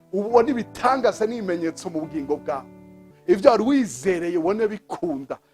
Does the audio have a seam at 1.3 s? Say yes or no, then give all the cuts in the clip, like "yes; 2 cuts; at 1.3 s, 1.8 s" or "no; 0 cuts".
no; 1 cut; at 3.1 s